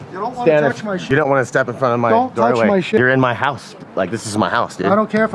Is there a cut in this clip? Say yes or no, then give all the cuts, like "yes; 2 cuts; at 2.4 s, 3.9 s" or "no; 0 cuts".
yes; 2 cuts; at 1.0 s, 3.0 s